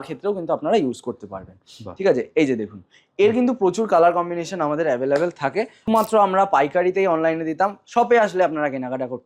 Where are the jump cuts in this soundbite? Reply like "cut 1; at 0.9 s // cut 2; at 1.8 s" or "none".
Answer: cut 1; at 5.9 s